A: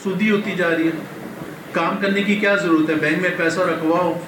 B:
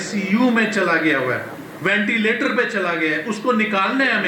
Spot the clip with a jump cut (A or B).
B